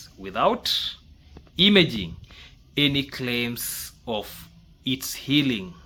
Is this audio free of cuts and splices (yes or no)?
yes